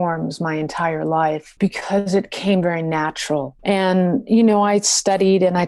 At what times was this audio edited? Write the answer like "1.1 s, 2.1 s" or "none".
1.5 s, 3.5 s